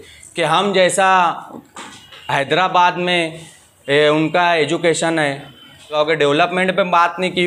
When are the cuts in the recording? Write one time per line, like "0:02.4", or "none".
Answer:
0:05.9